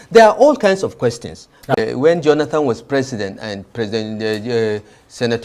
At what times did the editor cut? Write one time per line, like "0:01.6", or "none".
0:01.8